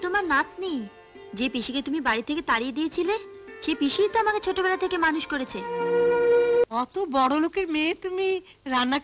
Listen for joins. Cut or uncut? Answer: cut